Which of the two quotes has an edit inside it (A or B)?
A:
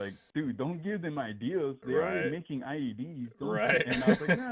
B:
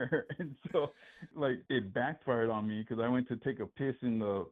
B